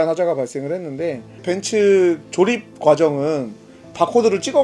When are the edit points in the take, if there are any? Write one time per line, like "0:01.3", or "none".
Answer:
0:01.5